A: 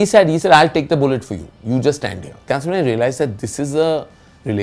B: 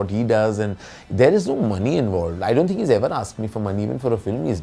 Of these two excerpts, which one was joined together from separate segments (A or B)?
A